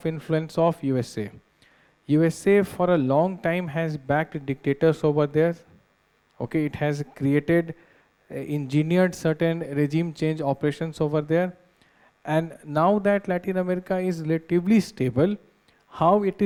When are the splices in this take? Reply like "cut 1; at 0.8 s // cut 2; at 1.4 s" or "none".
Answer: none